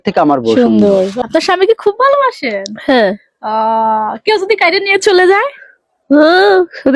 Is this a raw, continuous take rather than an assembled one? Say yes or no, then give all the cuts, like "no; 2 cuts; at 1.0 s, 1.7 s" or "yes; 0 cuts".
no; 1 cut; at 1.1 s